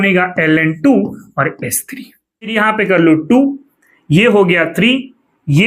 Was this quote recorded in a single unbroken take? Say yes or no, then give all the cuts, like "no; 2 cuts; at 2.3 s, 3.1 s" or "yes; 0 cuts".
no; 1 cut; at 2.5 s